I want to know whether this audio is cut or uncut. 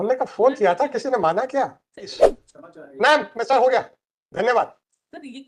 cut